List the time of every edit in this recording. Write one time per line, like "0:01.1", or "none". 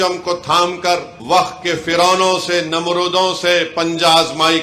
0:01.1

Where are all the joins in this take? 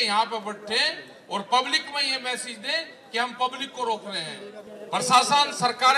0:04.7

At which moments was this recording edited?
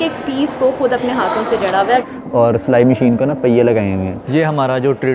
0:02.0
0:04.2

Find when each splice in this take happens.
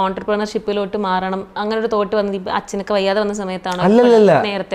none

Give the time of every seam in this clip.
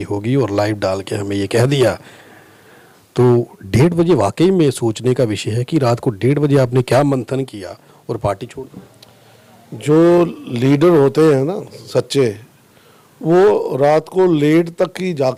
none

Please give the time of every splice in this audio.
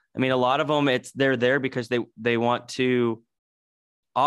none

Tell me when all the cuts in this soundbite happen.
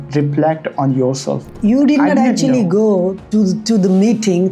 0:01.6
0:03.2

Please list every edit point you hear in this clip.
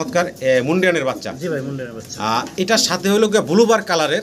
none

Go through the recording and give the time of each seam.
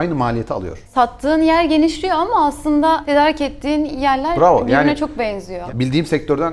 0:00.9
0:03.0
0:05.5

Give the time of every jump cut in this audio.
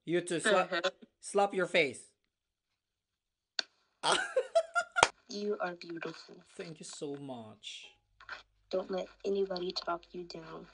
0:05.2

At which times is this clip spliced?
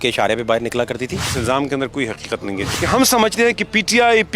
0:01.3
0:02.6

